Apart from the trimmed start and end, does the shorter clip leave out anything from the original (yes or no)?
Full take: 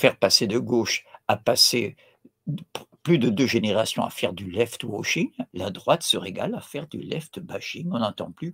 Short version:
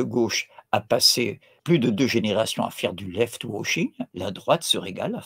yes